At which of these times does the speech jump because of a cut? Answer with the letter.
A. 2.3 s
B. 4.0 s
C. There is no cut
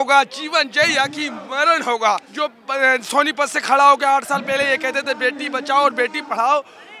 A